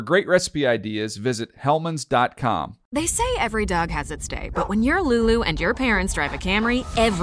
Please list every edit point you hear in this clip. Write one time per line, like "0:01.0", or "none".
0:02.8